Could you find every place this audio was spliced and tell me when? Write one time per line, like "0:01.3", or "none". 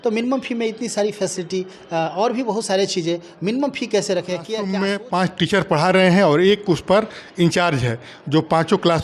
0:04.7